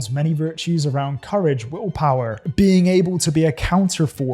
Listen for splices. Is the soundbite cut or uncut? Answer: uncut